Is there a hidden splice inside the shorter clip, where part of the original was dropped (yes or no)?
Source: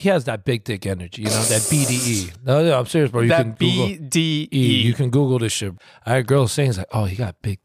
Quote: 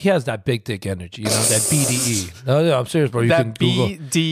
no